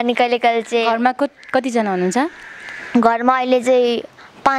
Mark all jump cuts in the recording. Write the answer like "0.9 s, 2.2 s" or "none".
none